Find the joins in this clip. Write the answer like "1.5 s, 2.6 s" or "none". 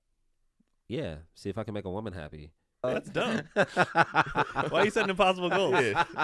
2.8 s